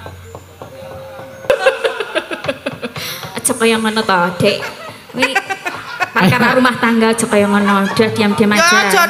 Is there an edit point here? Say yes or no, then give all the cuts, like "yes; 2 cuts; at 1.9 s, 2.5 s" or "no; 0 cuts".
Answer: yes; 1 cut; at 1.5 s